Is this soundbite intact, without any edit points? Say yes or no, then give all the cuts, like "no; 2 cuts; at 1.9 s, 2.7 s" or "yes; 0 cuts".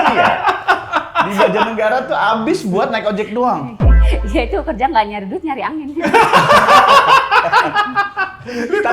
yes; 0 cuts